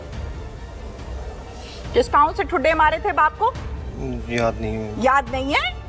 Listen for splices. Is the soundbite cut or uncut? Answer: uncut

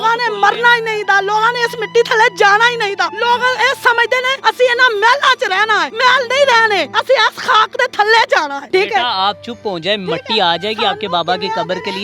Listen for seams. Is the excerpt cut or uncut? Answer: cut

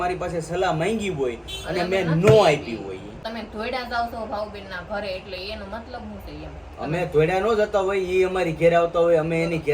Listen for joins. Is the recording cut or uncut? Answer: cut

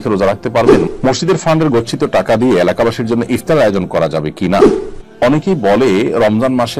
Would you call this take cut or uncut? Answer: cut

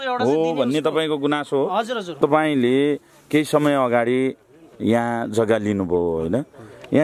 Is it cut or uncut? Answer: cut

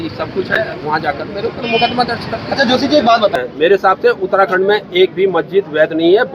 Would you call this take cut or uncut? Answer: cut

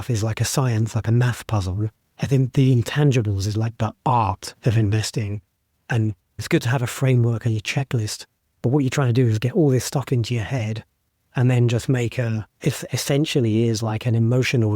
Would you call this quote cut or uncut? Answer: cut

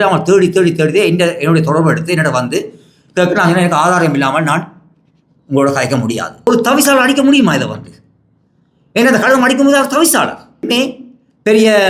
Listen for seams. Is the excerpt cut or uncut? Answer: cut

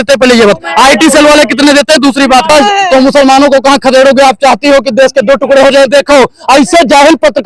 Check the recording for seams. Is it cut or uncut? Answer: cut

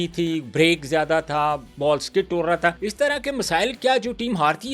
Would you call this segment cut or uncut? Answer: cut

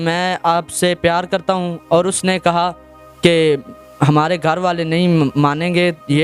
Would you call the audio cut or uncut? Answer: uncut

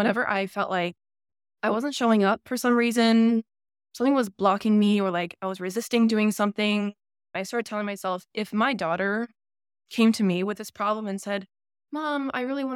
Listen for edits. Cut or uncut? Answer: cut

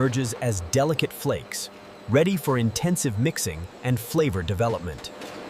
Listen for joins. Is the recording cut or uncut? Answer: uncut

